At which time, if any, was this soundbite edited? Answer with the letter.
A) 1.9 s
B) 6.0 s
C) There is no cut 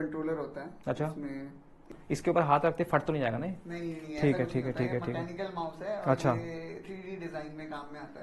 A